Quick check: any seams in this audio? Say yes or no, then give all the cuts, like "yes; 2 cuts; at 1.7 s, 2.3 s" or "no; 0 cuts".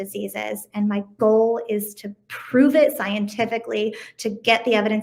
no; 0 cuts